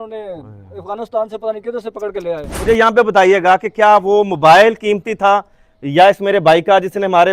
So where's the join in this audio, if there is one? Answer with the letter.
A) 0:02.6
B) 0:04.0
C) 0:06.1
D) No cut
A